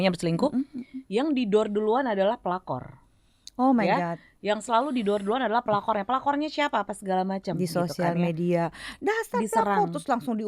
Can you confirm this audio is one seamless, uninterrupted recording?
yes; 0 cuts

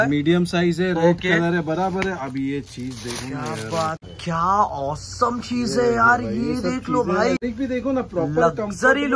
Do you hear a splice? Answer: yes; 2 cuts; at 4.0 s, 7.4 s

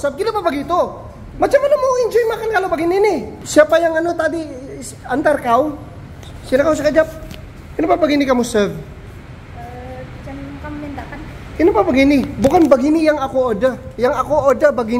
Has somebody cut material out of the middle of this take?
no; 0 cuts

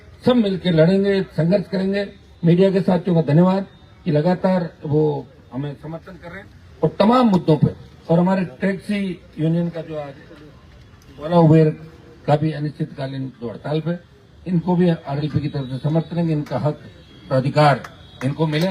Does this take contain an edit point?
no; 0 cuts

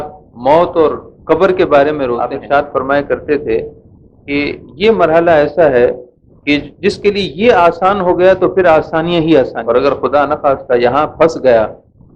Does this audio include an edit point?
yes; 2 cuts; at 2.4 s, 9.6 s

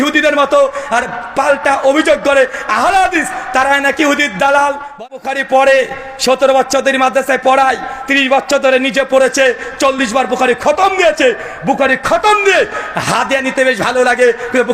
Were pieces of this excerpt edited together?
yes; 1 cut; at 5.0 s

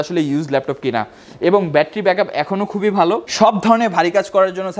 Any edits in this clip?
no; 0 cuts

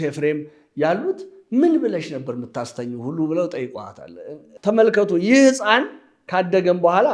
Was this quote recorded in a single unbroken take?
no; 1 cut; at 4.5 s

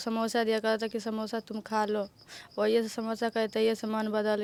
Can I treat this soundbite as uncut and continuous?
yes; 0 cuts

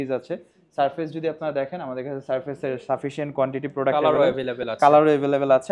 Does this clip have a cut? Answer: no; 0 cuts

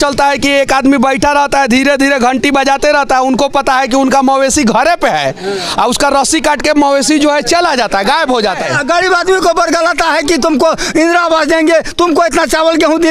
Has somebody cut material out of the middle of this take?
yes; 1 cut; at 8.6 s

